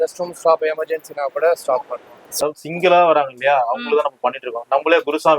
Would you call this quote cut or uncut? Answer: cut